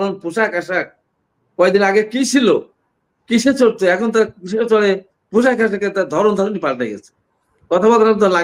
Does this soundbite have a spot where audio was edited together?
no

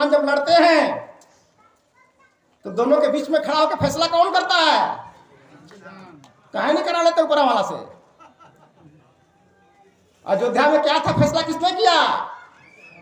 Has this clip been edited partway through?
no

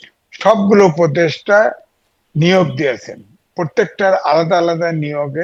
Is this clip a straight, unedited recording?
yes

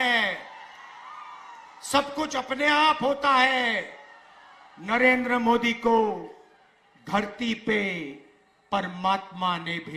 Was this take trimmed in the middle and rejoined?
no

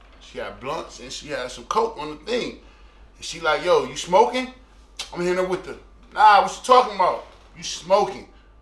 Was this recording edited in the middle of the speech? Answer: no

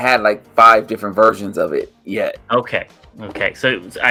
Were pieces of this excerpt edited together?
no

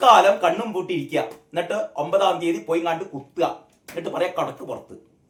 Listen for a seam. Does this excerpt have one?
no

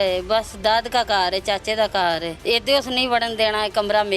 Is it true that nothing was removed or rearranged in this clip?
no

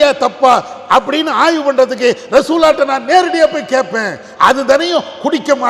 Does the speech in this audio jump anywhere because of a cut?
no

